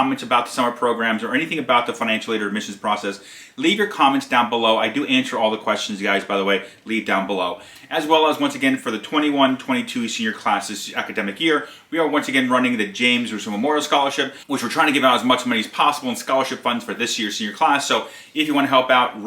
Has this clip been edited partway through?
yes; 1 cut; at 7.7 s

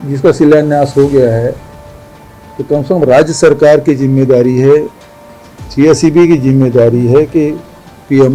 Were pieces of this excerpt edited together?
no; 0 cuts

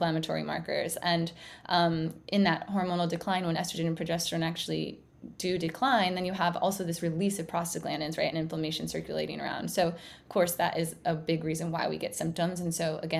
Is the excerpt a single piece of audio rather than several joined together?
yes; 0 cuts

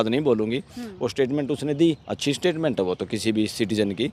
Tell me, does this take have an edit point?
no; 0 cuts

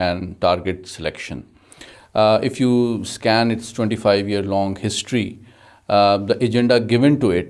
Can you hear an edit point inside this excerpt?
no; 0 cuts

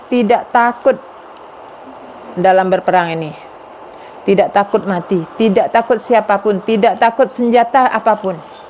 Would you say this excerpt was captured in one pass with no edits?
yes; 0 cuts

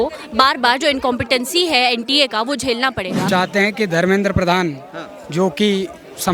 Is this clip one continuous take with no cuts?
no; 1 cut; at 3.3 s

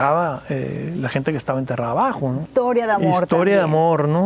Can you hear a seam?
yes; 1 cut; at 2.5 s

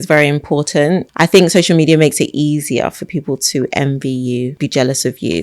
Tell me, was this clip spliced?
yes; 2 cuts; at 1.1 s, 4.6 s

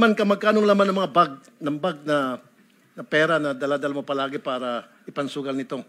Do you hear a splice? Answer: no; 0 cuts

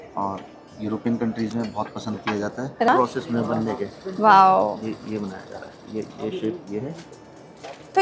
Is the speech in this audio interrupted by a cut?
yes; 1 cut; at 2.9 s

